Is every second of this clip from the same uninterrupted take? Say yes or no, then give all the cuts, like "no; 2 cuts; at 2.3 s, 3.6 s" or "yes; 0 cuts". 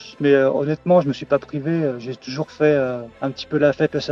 yes; 0 cuts